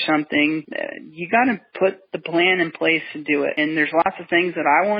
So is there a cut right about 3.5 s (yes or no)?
yes